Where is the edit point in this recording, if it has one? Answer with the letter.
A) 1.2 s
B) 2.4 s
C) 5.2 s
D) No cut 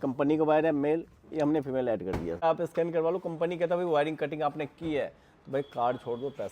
B